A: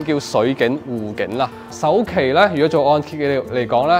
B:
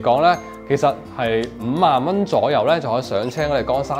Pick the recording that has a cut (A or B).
A